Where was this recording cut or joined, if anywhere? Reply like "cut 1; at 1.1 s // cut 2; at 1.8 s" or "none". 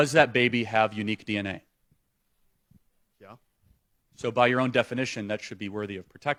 none